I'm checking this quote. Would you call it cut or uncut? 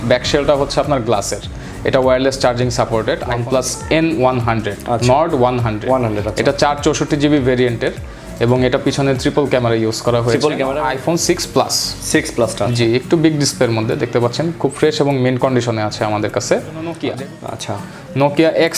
cut